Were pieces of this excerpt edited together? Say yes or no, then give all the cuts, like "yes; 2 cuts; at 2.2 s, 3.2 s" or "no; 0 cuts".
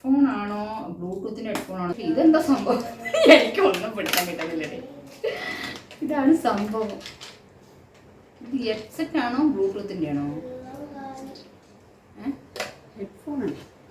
yes; 1 cut; at 1.9 s